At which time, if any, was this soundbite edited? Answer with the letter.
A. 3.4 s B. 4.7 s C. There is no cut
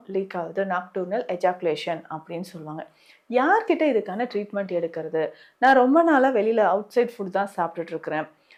C